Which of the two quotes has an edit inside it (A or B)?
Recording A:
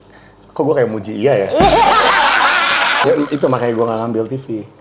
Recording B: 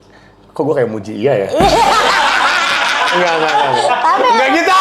A